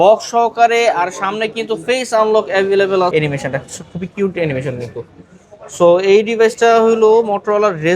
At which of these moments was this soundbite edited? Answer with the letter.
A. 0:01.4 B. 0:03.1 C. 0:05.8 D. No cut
B